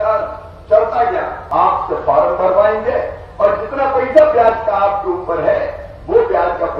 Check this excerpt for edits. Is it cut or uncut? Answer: cut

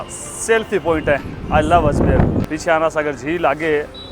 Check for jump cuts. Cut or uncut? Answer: cut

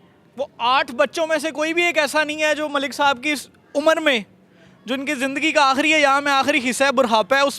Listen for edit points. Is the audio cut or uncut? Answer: uncut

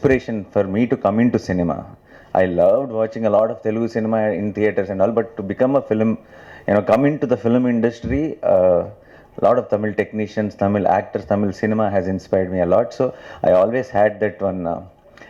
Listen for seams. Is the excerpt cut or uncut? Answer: uncut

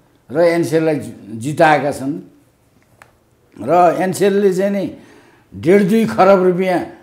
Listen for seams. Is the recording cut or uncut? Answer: uncut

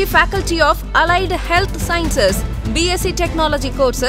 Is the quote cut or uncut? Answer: uncut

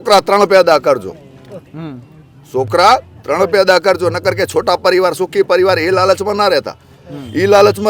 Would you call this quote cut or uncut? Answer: uncut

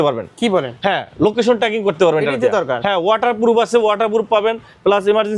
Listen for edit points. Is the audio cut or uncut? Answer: uncut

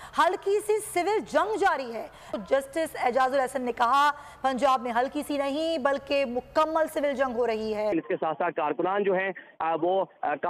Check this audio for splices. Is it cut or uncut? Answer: cut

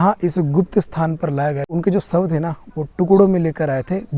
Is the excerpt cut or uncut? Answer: cut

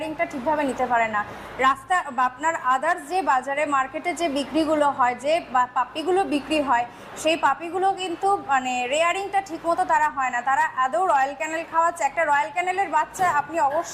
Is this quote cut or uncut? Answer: uncut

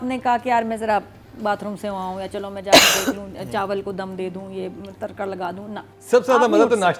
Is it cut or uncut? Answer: uncut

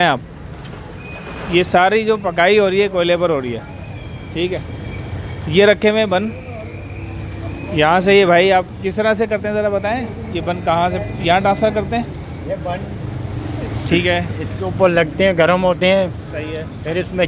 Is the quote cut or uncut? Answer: uncut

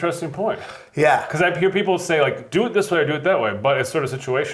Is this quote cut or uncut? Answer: uncut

